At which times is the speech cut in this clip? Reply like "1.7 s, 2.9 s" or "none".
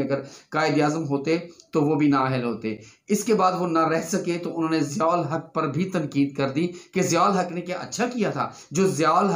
none